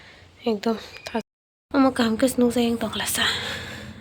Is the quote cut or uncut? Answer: cut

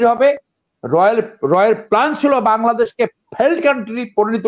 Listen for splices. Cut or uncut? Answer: uncut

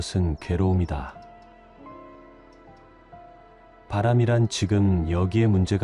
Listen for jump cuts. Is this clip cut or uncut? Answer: uncut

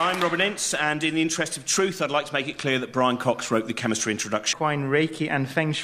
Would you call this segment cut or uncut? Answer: uncut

